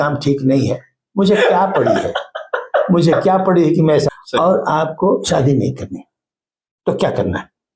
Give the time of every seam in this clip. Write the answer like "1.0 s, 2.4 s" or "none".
4.1 s